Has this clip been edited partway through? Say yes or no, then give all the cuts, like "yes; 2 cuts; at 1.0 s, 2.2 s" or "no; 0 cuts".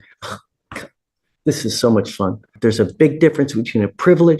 yes; 1 cut; at 2.5 s